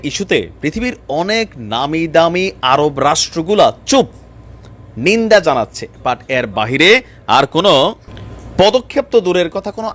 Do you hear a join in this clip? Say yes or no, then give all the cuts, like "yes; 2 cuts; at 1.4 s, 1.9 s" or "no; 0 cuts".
no; 0 cuts